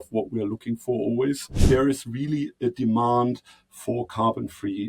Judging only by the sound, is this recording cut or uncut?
cut